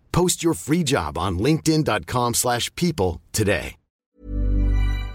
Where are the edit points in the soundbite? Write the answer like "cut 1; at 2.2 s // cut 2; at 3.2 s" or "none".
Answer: cut 1; at 4.1 s